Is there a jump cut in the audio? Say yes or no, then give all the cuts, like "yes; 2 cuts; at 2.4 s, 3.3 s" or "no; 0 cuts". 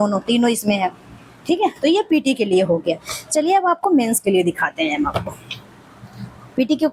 no; 0 cuts